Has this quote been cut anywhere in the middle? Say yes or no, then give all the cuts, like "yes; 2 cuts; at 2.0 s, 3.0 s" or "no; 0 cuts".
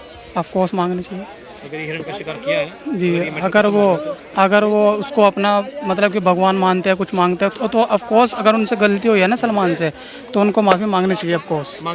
no; 0 cuts